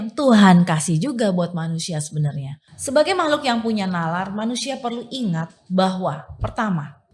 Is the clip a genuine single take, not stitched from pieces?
no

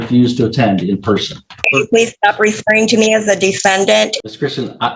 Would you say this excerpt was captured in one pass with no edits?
no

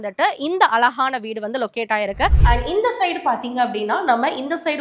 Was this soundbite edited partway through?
yes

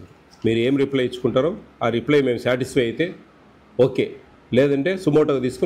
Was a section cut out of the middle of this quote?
no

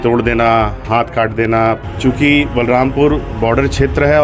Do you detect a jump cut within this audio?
yes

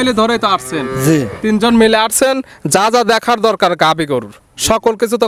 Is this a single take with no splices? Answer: yes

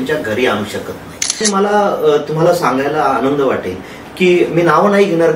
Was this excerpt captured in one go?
no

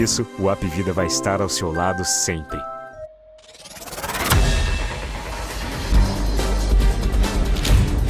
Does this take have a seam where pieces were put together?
yes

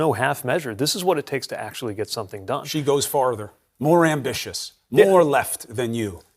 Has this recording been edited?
yes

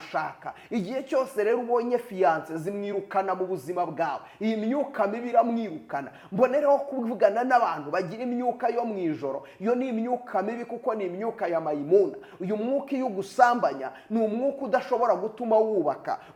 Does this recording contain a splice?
no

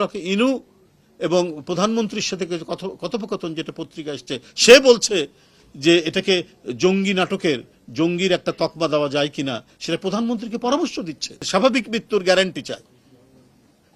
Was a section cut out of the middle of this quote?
yes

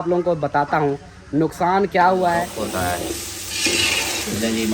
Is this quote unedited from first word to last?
no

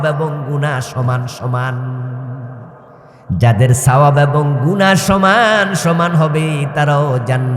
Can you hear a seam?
yes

